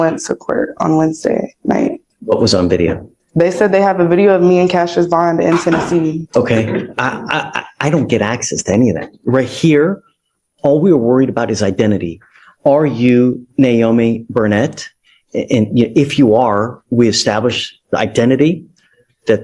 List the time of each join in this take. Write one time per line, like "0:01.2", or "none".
0:02.1
0:06.2